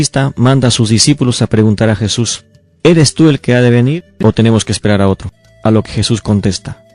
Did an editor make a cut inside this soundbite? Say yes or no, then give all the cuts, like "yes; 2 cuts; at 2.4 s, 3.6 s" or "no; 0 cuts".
yes; 1 cut; at 1.4 s